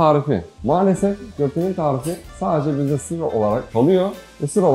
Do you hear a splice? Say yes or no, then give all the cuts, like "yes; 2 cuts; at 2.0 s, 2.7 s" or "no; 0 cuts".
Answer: no; 0 cuts